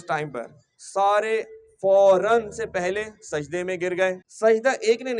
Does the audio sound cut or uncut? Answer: uncut